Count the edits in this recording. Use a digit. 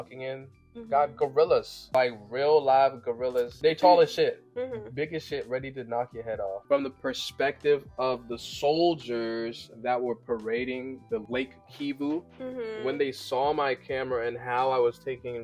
3